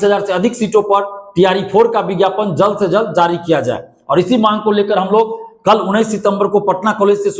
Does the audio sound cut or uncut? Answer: uncut